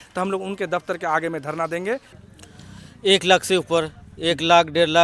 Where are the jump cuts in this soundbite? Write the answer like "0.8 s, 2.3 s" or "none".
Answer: 2.1 s